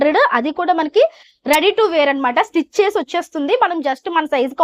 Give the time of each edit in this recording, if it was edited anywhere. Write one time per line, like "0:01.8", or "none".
none